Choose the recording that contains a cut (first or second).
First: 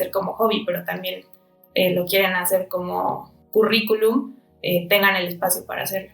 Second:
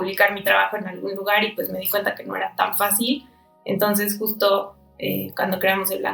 first